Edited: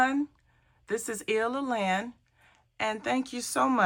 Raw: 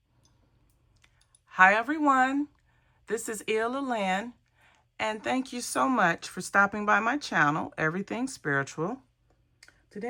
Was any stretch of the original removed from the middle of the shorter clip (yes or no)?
no